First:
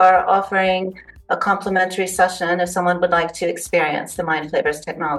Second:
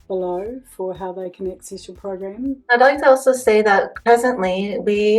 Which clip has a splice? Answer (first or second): second